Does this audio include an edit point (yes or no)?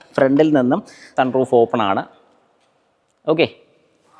yes